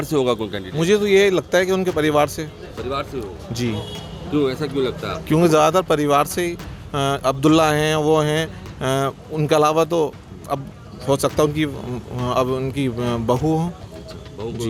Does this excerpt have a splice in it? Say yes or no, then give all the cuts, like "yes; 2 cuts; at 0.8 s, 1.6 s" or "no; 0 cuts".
no; 0 cuts